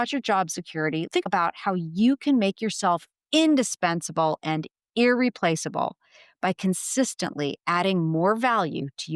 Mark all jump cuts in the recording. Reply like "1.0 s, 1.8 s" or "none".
1.1 s, 3.1 s